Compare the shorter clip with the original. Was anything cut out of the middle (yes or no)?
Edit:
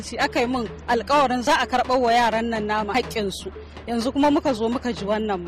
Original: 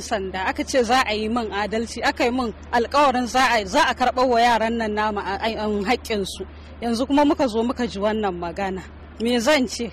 yes